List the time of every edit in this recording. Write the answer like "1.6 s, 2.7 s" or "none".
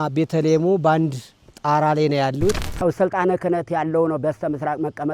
2.6 s